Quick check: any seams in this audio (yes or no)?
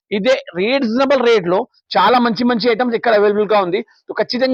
no